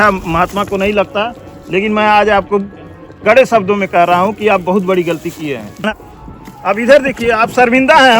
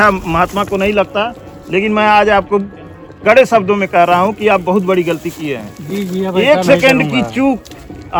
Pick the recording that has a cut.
first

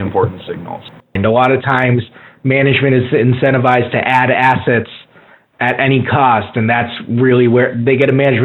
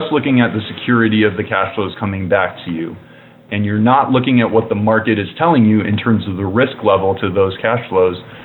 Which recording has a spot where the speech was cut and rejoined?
first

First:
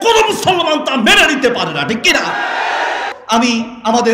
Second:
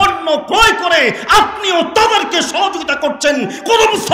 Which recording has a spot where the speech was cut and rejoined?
first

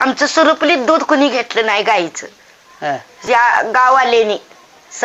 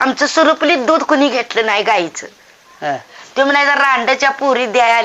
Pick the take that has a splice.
second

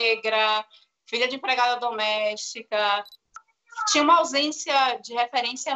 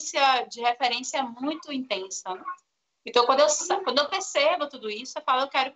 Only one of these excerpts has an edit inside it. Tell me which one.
first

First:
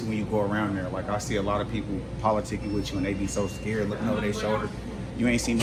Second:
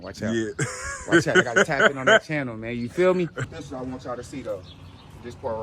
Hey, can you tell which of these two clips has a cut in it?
second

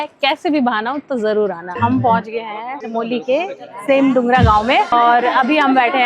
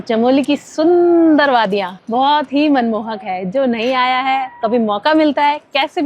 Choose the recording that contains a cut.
first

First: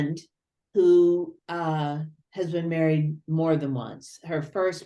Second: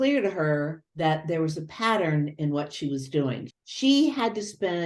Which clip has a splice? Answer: second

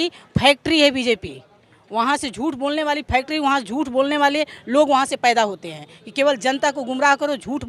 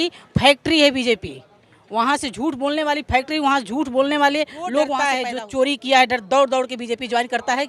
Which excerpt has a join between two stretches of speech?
second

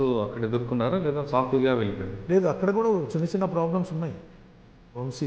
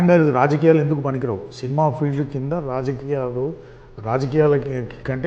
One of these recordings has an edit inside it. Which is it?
first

